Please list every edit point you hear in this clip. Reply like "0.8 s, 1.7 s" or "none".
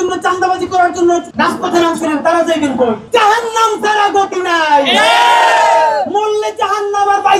1.3 s, 3.0 s